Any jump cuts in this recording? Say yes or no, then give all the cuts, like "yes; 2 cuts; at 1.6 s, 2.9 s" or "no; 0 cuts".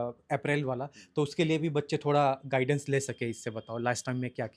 no; 0 cuts